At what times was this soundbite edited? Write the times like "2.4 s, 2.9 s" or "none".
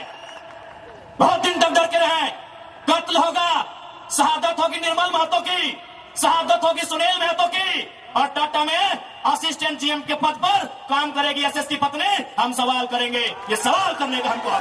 none